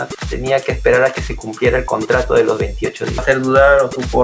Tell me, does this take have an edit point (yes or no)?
yes